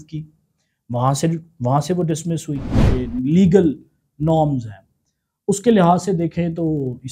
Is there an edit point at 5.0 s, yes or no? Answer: no